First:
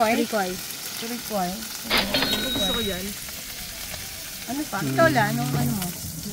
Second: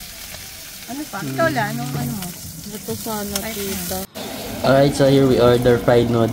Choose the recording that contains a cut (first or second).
second